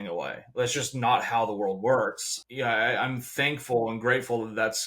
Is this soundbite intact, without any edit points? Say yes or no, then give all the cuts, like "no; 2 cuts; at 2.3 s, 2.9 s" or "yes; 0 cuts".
no; 1 cut; at 2.3 s